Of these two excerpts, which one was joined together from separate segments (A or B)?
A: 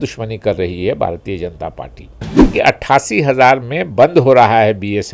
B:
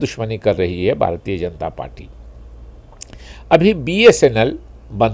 A